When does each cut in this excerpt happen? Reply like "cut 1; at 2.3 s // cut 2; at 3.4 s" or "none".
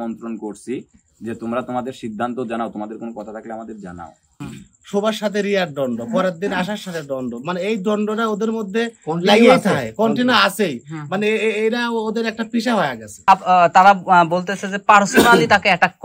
cut 1; at 4.4 s // cut 2; at 13.2 s